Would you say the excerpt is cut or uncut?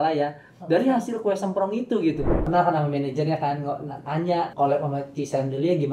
cut